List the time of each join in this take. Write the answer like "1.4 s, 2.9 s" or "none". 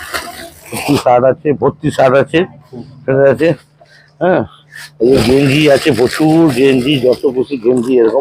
none